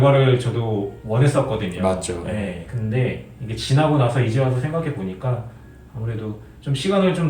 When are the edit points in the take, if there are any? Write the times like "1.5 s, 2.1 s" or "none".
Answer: none

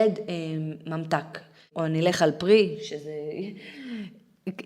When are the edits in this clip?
1.7 s

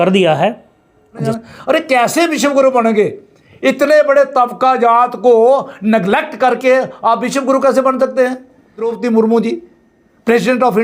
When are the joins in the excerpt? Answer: 1.3 s, 8.9 s

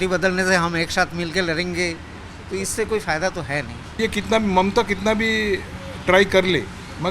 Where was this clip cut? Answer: 3.9 s

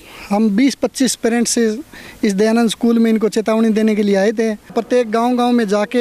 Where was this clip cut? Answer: 4.7 s

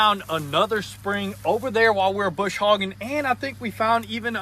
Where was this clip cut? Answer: none

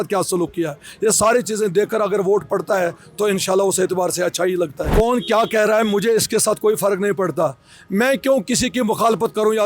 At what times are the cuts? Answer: 4.9 s

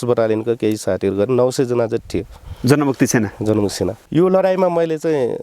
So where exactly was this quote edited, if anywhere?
4.0 s

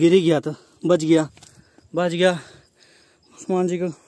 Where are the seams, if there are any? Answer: none

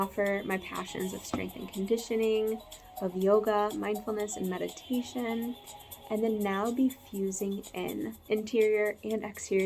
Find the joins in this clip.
8.2 s

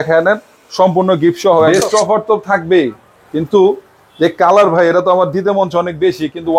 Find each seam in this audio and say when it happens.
1.7 s

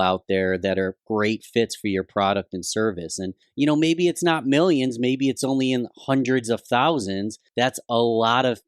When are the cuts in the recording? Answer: 3.4 s, 7.4 s

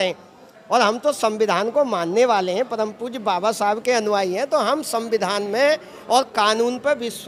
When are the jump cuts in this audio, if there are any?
none

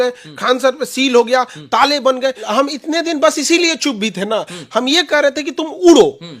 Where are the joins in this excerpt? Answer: 2.5 s

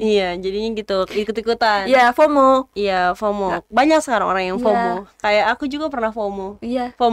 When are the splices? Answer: none

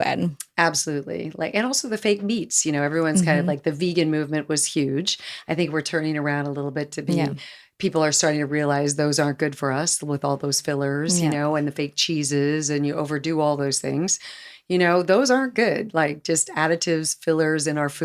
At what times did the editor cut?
none

